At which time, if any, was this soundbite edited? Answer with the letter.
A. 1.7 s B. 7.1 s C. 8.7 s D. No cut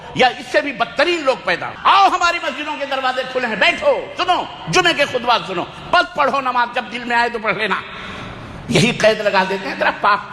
A